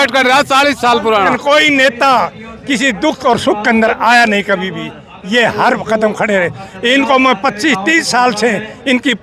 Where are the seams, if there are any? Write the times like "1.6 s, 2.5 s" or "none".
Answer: 1.4 s

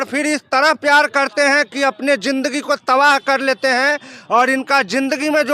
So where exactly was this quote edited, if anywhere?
none

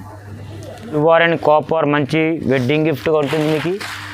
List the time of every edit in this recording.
0.9 s

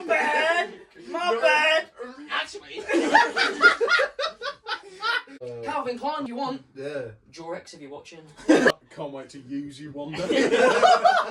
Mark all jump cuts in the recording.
5.4 s, 6.3 s

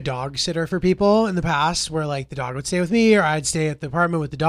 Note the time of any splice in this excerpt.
none

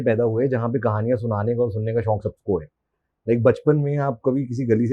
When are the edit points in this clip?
none

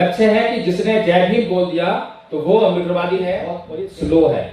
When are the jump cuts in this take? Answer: 3.6 s

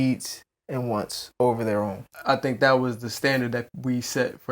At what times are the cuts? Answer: 2.1 s

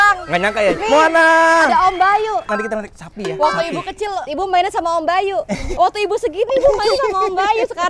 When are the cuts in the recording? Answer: 0.8 s, 5.6 s

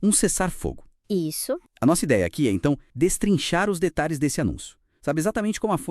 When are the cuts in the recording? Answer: 2.9 s

